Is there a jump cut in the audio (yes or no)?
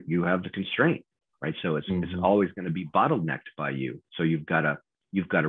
no